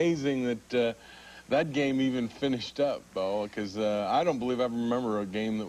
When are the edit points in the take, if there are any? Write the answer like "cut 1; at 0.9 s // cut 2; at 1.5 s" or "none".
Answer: cut 1; at 3.7 s